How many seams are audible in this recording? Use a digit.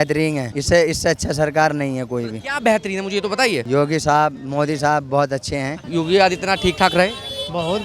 1